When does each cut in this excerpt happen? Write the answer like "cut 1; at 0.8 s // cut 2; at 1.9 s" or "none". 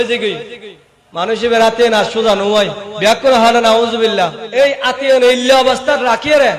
cut 1; at 4.4 s